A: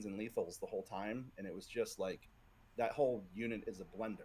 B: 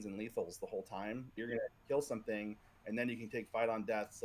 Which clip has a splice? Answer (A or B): B